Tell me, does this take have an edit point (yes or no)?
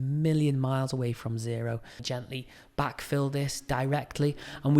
yes